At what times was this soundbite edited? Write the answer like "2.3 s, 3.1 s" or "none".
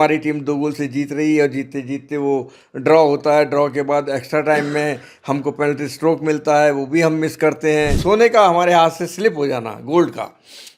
8.0 s